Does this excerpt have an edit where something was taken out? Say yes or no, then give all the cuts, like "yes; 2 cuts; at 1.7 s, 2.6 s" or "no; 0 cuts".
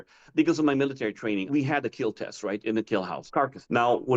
yes; 2 cuts; at 1.5 s, 3.2 s